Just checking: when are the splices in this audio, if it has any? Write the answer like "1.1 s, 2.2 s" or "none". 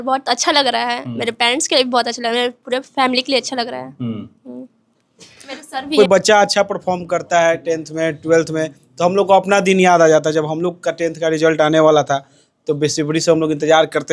6.0 s